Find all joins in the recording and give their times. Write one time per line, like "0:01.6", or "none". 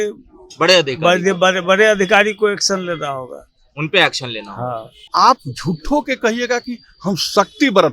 0:05.1